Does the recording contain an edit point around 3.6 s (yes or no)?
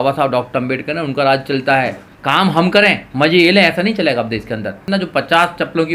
no